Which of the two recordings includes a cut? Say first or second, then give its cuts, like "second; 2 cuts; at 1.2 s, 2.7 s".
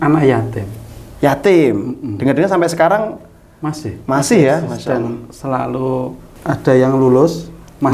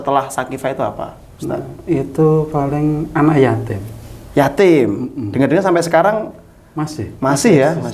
first; 1 cut; at 6.3 s